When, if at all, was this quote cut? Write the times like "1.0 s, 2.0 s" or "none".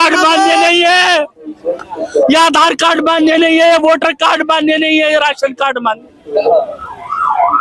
none